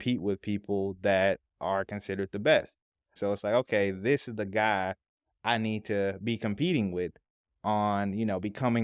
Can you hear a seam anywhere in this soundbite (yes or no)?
yes